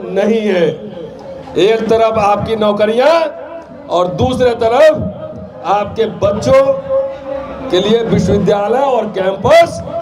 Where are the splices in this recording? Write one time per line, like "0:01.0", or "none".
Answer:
none